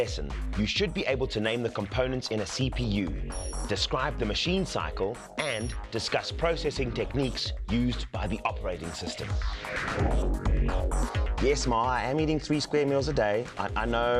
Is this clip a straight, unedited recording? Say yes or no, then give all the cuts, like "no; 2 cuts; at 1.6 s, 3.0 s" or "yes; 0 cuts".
yes; 0 cuts